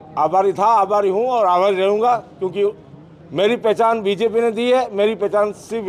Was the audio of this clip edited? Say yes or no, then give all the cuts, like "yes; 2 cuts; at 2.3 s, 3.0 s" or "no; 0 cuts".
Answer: no; 0 cuts